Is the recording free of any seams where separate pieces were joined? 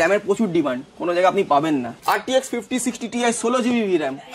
no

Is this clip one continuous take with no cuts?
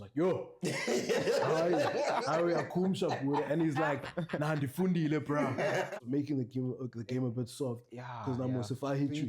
no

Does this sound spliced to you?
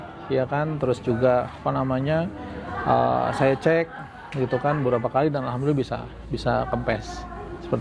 no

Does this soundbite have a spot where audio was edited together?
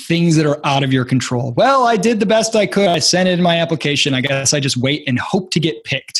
yes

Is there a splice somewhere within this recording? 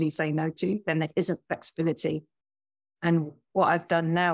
no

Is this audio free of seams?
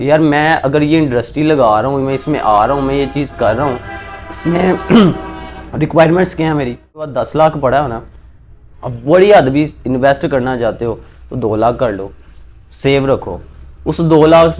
no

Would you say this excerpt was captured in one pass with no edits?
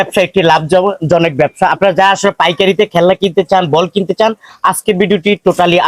yes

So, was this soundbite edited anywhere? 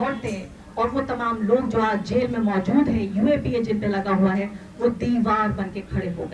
no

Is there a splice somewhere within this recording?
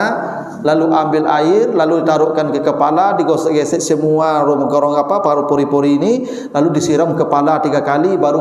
no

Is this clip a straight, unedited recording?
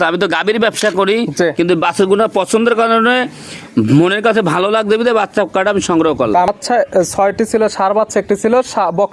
no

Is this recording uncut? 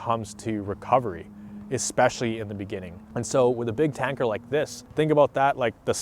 no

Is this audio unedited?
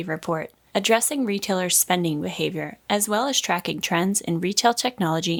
yes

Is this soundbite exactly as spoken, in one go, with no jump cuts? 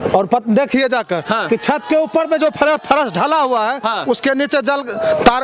yes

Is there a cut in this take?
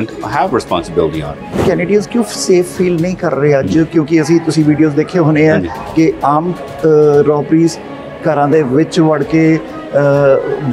yes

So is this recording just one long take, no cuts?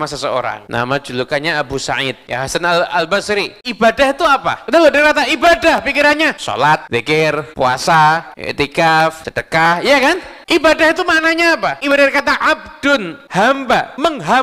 no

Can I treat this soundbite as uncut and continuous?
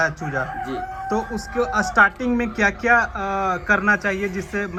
yes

